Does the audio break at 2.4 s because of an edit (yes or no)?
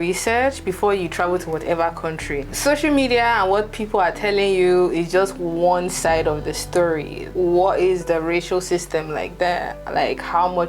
no